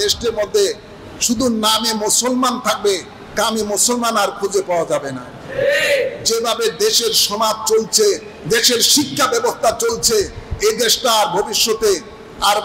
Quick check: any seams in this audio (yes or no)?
no